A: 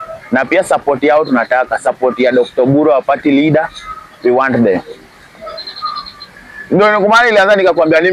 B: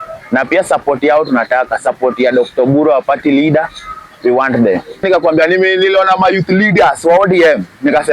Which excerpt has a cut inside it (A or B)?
B